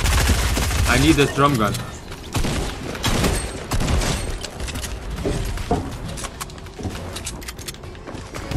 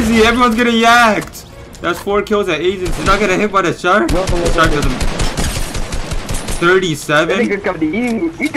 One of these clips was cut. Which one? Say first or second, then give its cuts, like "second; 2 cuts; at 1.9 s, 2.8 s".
second; 1 cut; at 3.0 s